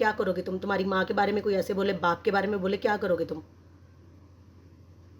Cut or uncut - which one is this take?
uncut